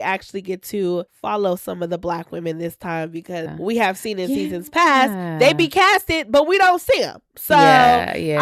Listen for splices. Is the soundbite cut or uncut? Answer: cut